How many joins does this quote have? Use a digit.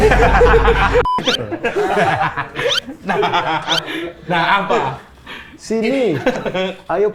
1